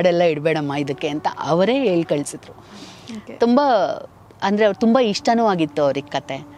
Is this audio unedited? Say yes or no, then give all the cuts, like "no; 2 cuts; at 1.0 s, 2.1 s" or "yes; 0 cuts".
yes; 0 cuts